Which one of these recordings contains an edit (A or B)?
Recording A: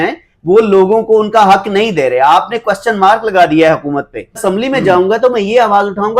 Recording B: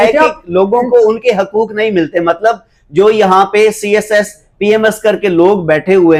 A